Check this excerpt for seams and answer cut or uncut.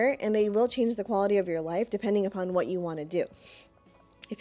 uncut